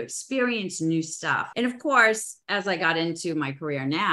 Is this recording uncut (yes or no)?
yes